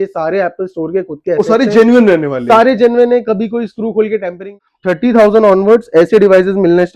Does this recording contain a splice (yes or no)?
yes